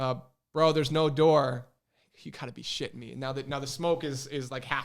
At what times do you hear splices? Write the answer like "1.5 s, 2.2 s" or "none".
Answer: none